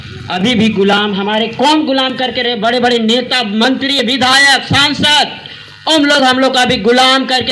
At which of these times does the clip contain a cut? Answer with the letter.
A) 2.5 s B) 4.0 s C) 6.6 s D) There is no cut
D